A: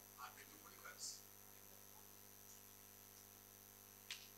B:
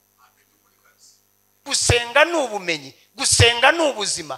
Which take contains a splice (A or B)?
B